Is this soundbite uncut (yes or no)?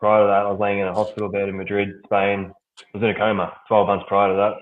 yes